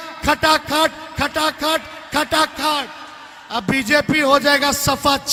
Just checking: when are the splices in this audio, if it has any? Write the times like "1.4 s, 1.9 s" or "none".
none